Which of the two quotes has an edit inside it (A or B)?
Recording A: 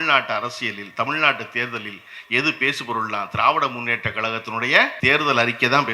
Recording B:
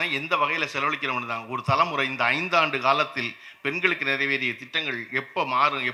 A